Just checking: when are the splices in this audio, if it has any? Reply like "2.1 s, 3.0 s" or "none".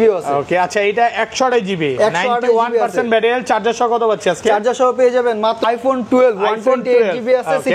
5.6 s